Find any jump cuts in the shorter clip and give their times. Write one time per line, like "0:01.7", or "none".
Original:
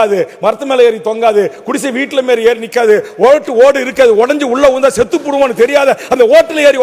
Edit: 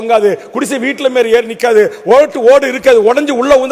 none